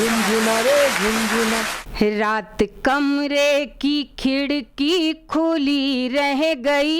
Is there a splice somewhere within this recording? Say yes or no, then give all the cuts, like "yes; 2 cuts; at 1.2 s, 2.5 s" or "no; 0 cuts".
yes; 1 cut; at 1.8 s